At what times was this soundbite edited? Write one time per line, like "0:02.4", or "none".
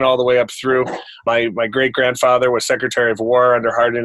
0:01.2